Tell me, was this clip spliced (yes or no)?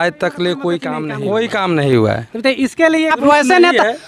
yes